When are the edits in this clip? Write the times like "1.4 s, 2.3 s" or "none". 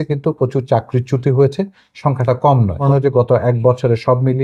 2.8 s